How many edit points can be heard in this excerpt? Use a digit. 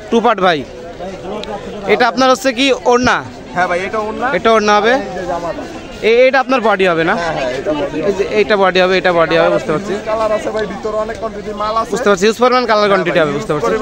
0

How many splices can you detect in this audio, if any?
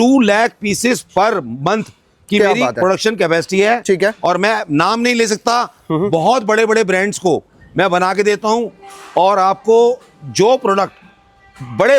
0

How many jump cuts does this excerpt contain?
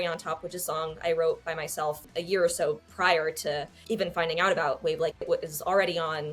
2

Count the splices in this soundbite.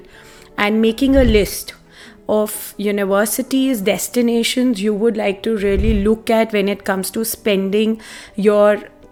0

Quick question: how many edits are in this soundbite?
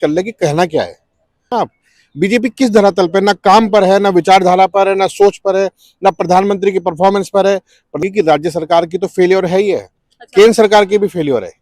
2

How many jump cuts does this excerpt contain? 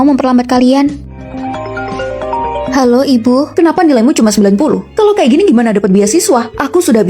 1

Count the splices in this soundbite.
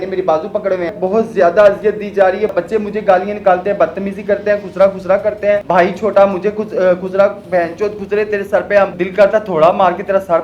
4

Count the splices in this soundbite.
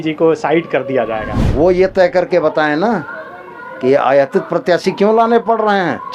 1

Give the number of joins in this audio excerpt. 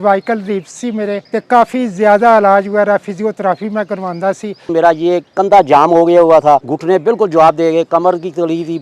3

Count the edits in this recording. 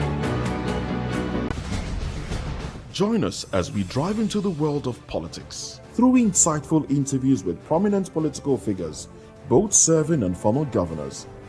1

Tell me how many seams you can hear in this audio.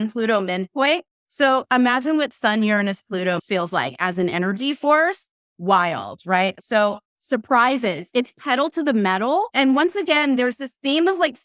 4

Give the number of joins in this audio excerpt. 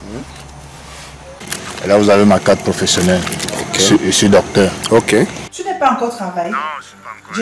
1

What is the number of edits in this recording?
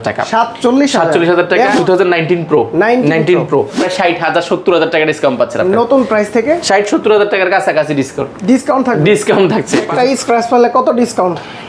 2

